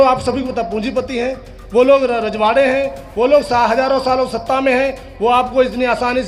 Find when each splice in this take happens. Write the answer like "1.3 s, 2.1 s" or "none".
none